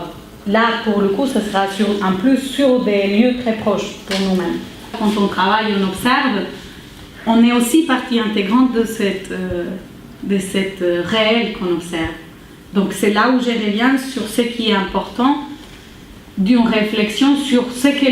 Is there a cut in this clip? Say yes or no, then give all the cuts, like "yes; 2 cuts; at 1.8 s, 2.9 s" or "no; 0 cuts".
yes; 1 cut; at 10.7 s